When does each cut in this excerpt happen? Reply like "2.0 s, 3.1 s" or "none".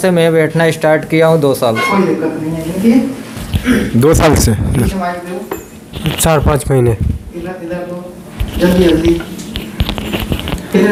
none